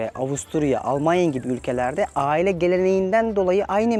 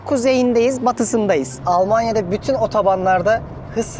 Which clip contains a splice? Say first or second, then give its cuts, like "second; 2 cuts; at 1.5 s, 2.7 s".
second; 1 cut; at 1.5 s